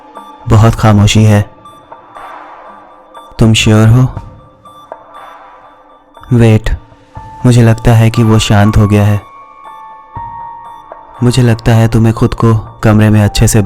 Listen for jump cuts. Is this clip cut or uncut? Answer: cut